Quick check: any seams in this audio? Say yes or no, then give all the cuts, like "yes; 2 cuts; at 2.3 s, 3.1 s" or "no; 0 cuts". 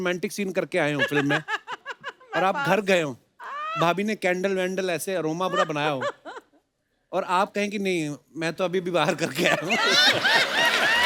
no; 0 cuts